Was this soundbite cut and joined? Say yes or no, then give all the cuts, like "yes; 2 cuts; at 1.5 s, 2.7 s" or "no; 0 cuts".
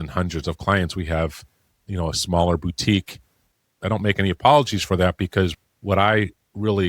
yes; 1 cut; at 3.6 s